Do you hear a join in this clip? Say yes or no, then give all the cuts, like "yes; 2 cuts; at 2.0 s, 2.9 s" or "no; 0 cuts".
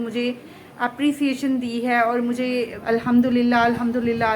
yes; 1 cut; at 2.8 s